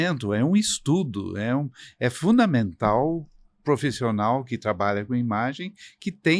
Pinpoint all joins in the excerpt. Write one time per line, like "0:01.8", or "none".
none